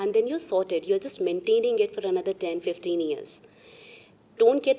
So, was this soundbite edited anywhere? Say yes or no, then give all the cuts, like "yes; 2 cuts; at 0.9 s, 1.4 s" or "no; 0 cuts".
no; 0 cuts